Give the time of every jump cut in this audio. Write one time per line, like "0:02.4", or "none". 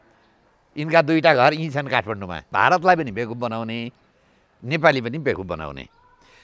0:02.5